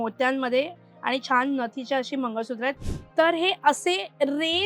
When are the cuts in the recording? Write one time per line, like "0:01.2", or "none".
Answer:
0:02.8